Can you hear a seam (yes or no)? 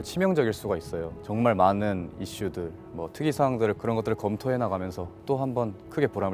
yes